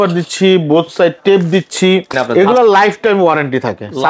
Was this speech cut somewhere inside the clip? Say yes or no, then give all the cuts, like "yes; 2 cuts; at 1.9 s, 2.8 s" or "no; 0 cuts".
yes; 1 cut; at 2.2 s